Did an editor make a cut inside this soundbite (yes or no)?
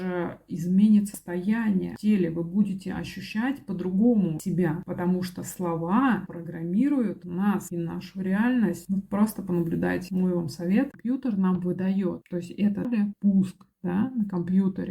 yes